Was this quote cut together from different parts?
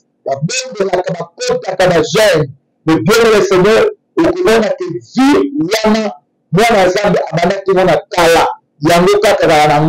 no; 0 cuts

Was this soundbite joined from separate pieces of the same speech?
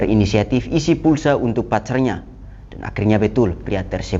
no; 0 cuts

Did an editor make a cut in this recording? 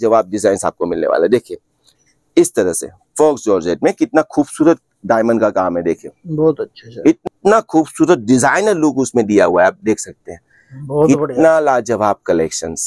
yes; 1 cut; at 7.2 s

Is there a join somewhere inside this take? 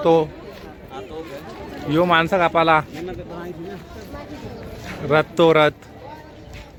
no; 0 cuts

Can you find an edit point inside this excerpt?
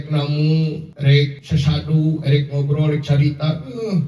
yes; 1 cut; at 1.2 s

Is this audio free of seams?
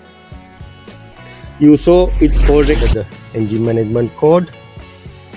no; 3 cuts; at 1.6 s, 2.7 s, 4.5 s

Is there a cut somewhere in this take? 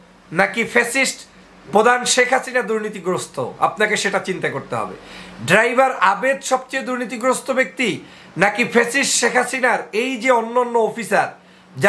no; 0 cuts

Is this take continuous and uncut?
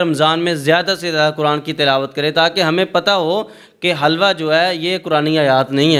yes; 0 cuts

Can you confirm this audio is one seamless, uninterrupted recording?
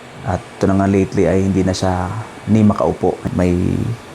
no; 1 cut; at 3.2 s

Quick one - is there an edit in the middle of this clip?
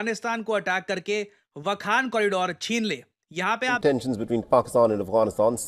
yes; 1 cut; at 3.8 s

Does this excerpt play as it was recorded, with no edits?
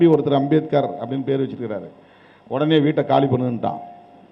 yes; 0 cuts

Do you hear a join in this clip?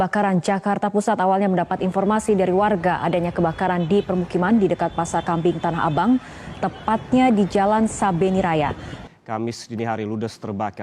no; 0 cuts

